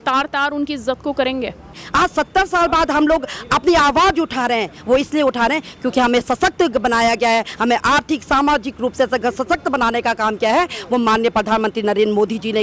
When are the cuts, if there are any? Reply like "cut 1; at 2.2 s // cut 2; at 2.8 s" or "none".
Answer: cut 1; at 1.8 s